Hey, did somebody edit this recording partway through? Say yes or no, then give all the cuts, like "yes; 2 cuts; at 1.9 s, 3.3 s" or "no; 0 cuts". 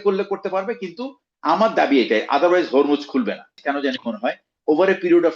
yes; 1 cut; at 3.6 s